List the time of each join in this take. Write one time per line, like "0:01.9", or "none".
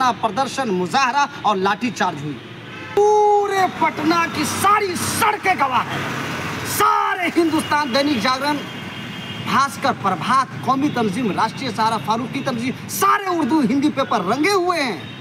0:03.0